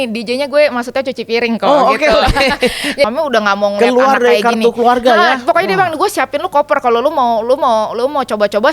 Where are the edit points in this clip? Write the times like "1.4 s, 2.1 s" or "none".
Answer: 3.1 s